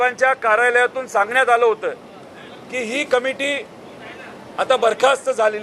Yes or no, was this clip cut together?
no